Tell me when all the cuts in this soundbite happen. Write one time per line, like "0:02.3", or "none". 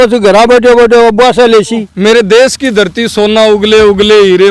0:01.9